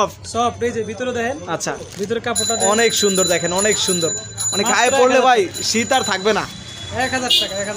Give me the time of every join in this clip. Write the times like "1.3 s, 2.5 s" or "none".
none